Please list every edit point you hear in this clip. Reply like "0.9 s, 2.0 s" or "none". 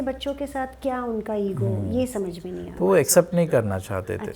none